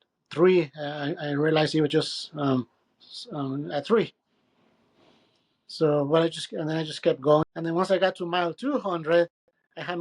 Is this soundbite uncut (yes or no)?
no